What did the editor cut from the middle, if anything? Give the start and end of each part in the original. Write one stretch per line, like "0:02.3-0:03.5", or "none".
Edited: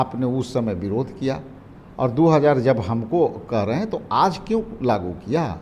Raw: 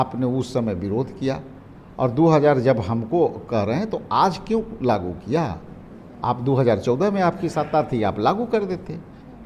none